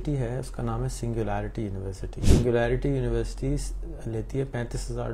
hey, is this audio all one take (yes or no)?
no